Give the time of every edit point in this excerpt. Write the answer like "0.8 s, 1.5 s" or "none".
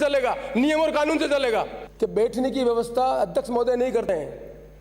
1.8 s